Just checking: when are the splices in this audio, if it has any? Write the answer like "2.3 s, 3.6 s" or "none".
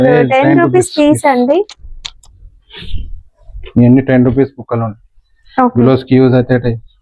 none

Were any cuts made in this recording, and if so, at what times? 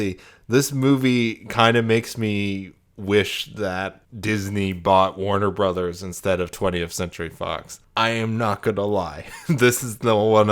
4.0 s, 7.8 s

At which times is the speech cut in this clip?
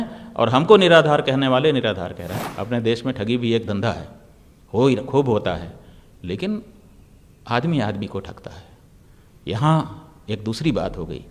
2.3 s

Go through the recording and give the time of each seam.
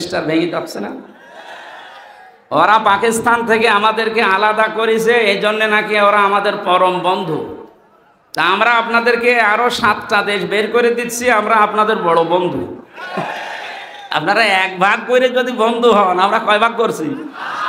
none

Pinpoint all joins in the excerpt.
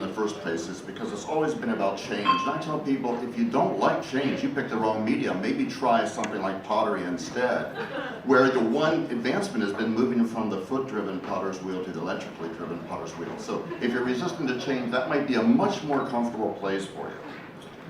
15.2 s

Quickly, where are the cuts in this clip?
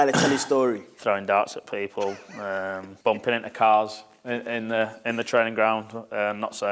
0.9 s, 2.9 s

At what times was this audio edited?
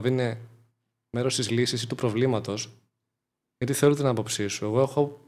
none

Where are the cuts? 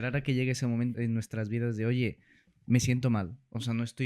0.9 s

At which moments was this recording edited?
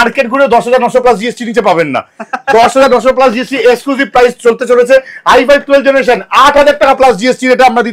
none

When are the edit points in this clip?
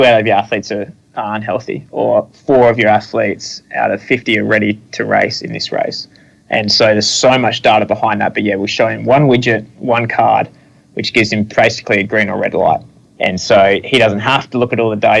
13.0 s

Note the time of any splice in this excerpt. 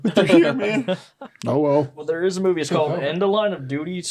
2.0 s

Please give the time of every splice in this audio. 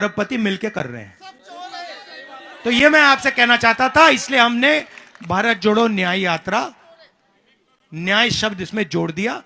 none

